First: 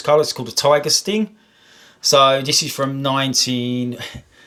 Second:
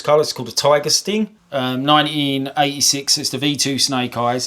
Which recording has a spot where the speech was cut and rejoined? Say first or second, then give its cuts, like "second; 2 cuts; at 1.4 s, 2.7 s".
second; 1 cut; at 1.4 s